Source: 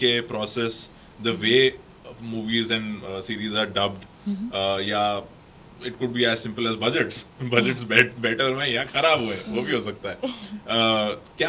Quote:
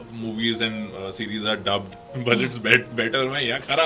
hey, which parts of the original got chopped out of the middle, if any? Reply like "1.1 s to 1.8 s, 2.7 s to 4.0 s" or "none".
4.1 s to 7.2 s

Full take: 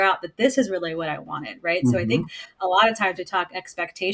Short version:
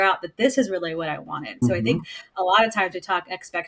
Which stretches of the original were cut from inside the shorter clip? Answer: 1.6 s to 1.8 s

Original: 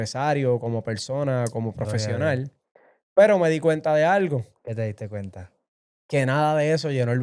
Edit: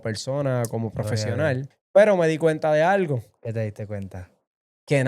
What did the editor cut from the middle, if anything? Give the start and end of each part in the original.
2.6 s to 3.0 s

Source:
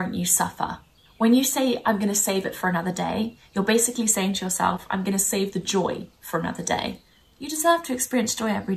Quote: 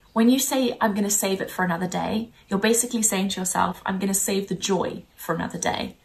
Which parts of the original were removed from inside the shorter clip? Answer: none

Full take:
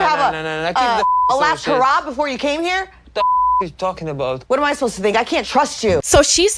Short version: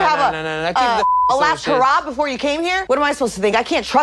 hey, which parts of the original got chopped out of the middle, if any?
2.8 s to 4.4 s

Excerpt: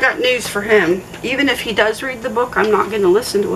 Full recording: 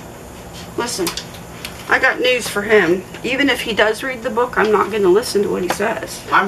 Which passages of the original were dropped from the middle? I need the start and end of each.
none

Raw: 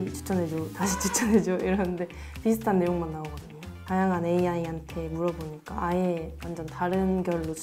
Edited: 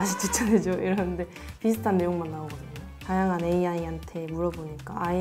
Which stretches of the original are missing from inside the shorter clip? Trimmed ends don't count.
none

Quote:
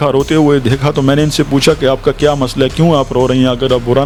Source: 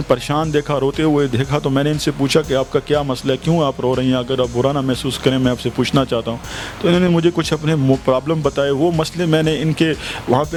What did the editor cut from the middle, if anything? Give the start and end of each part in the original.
none

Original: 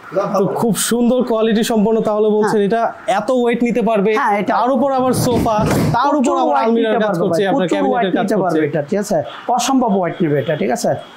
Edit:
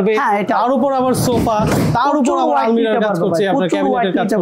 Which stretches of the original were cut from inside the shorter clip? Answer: none

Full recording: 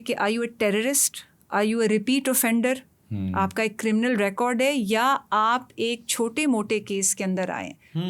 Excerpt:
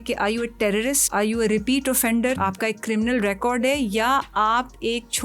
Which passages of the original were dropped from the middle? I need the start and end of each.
1.0 s to 1.4 s, 2.8 s to 3.3 s

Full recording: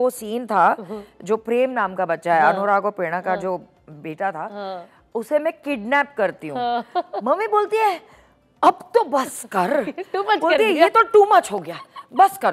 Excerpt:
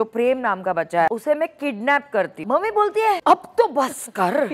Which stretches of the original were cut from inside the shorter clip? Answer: 2.4 s to 5.1 s, 6.4 s to 7.1 s, 8.0 s to 8.6 s

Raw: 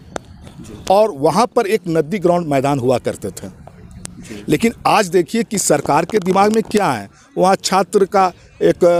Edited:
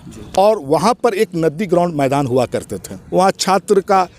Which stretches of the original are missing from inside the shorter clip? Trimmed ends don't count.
3.4 s to 7.2 s

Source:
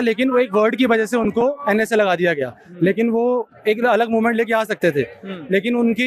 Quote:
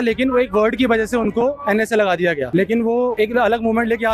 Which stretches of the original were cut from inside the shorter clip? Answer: 2.4 s to 2.7 s, 3.4 s to 3.6 s

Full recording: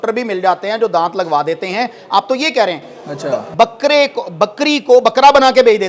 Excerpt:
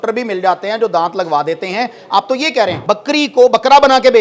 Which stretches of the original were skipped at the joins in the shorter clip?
2.8 s to 4.3 s

